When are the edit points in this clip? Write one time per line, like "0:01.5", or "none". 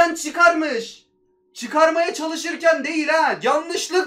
none